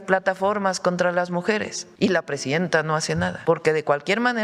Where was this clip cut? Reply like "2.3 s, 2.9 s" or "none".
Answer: 1.8 s, 3.4 s